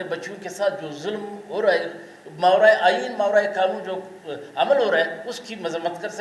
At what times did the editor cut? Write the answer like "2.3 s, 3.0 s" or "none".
none